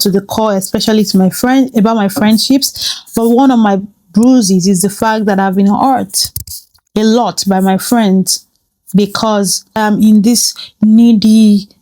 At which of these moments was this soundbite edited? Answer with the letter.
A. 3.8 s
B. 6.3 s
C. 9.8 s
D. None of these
C